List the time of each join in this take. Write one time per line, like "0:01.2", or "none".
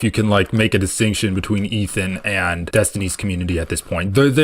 0:02.6